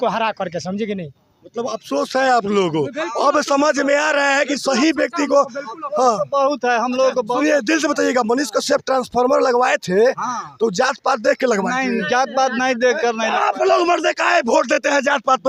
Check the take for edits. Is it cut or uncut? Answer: uncut